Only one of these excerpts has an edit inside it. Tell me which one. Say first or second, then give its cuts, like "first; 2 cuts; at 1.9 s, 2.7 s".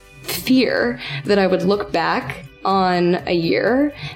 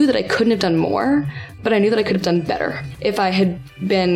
second; 1 cut; at 2.9 s